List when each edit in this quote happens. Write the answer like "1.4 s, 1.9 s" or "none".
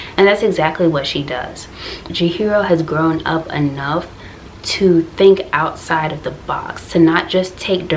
2.0 s